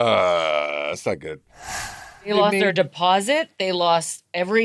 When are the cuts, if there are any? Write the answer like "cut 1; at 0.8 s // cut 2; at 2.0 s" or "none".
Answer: cut 1; at 1.9 s